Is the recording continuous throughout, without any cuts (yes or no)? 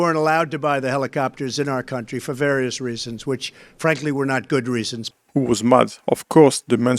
no